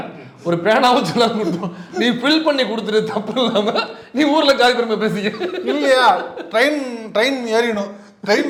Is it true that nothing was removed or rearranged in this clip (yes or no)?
yes